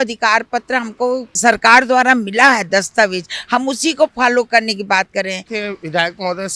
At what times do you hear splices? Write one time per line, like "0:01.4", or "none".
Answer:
0:01.4
0:05.5